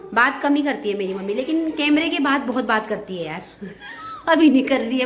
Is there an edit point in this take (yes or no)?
no